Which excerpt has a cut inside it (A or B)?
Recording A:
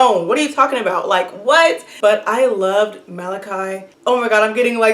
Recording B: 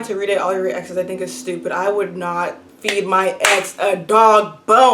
A